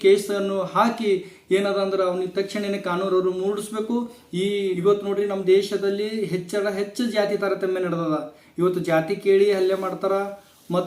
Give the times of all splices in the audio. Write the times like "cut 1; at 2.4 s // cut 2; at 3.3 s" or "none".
cut 1; at 4.6 s